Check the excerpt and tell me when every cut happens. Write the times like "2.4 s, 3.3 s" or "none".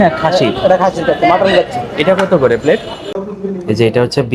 3.2 s